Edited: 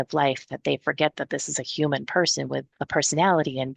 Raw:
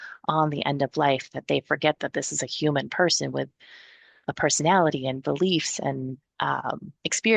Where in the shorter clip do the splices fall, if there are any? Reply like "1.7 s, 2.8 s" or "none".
2.8 s